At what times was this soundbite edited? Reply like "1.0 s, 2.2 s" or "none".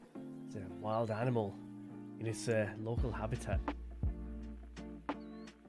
3.6 s